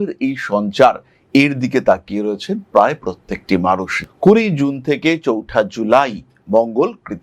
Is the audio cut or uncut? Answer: cut